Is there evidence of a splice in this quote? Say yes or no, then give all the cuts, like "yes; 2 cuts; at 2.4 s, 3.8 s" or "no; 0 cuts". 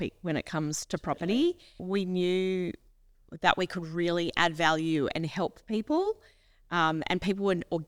yes; 1 cut; at 1.8 s